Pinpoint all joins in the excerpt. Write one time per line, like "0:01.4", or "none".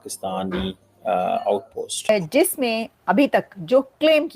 0:02.1